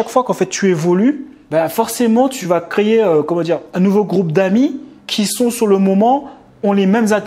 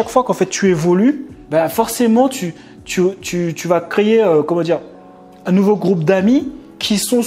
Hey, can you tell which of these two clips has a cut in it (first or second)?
first